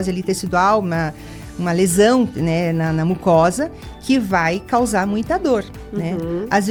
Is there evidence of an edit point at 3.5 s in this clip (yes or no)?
no